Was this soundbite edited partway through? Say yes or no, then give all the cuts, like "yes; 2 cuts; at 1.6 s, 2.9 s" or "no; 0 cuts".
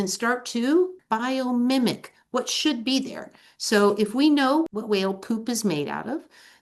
yes; 2 cuts; at 1.0 s, 4.7 s